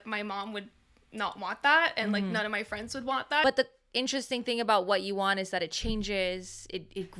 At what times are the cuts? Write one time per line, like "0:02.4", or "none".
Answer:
0:03.4